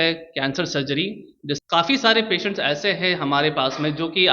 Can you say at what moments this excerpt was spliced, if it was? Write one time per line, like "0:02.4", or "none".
0:01.6